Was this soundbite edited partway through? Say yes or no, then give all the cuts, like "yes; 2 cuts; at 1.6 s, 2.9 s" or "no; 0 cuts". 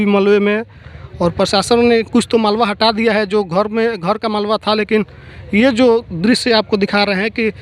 no; 0 cuts